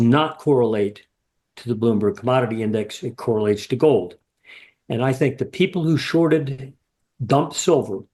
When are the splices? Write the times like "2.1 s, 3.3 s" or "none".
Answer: none